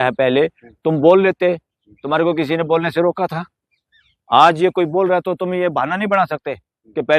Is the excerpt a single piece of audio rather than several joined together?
yes; 0 cuts

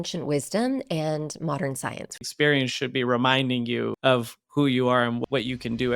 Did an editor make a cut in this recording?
yes; 3 cuts; at 2.3 s, 3.9 s, 5.2 s

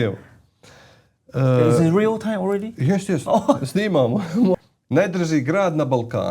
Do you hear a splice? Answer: yes; 1 cut; at 4.5 s

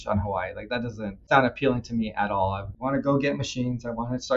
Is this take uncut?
no; 2 cuts; at 1.2 s, 2.7 s

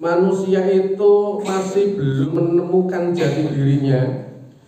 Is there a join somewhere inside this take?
yes; 1 cut; at 2.3 s

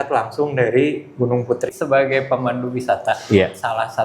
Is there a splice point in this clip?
yes; 1 cut; at 1.7 s

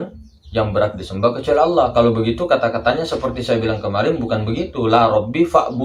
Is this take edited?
no; 0 cuts

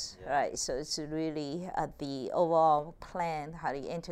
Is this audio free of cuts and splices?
yes; 0 cuts

